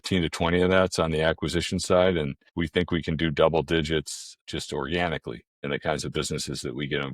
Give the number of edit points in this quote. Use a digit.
3